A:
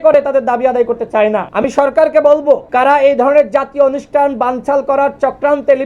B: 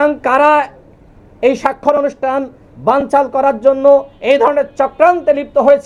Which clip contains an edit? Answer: A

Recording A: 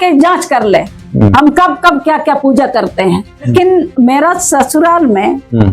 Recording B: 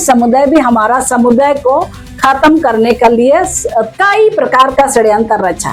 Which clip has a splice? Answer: A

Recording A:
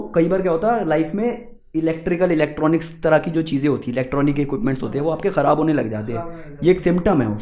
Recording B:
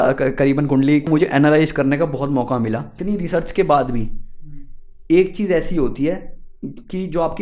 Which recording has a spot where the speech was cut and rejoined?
B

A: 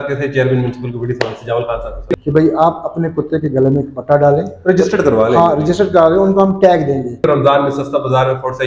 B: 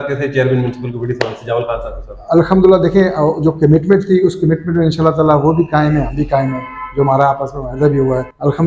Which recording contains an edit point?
A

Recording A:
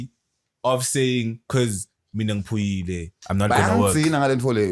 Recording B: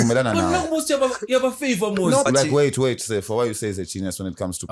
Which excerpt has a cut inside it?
B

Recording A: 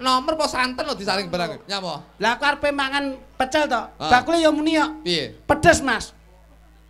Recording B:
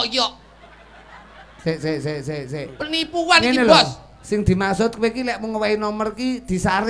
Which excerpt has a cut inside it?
A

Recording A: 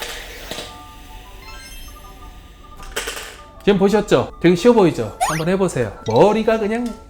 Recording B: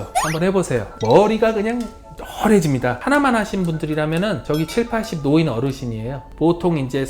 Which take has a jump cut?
B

